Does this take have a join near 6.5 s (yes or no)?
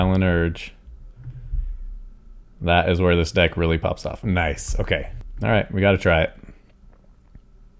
no